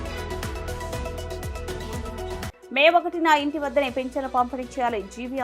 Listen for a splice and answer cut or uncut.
cut